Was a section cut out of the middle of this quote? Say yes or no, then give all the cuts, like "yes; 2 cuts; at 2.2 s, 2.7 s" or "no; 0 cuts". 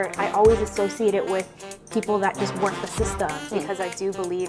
yes; 1 cut; at 3.4 s